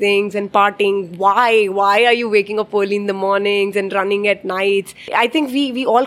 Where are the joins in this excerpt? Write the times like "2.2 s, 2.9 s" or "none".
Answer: 5.1 s